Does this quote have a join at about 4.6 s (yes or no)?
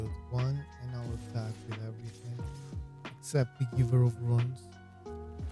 yes